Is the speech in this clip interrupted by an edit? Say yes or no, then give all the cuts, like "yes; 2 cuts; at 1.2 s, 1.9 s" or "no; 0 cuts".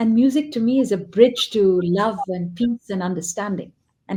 no; 0 cuts